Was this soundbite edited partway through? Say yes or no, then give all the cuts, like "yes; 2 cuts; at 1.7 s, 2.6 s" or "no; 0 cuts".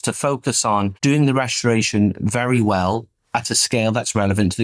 yes; 1 cut; at 0.9 s